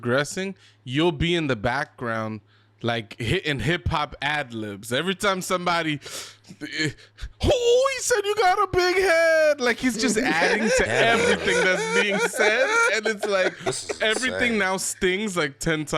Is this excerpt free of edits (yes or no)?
yes